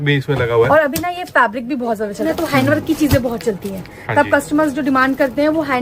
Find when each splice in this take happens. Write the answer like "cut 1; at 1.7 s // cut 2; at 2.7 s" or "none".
cut 1; at 2.2 s

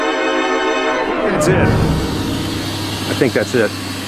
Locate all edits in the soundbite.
cut 1; at 2.0 s

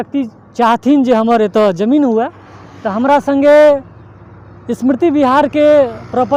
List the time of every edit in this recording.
none

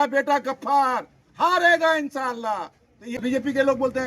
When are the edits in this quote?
cut 1; at 3.2 s

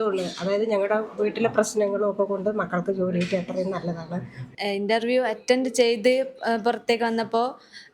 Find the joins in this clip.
cut 1; at 4.4 s

